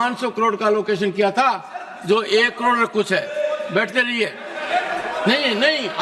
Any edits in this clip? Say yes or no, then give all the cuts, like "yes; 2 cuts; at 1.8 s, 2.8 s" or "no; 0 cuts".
no; 0 cuts